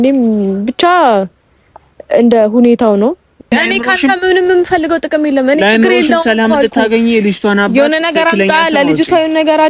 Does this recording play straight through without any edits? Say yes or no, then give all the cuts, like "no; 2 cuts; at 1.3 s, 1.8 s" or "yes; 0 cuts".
no; 1 cut; at 3.5 s